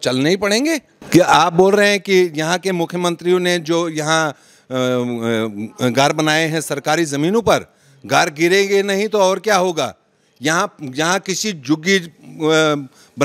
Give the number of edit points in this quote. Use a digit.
1